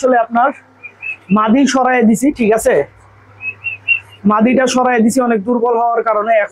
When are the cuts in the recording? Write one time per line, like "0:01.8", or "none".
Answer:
none